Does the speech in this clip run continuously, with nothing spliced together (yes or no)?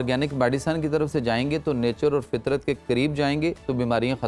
yes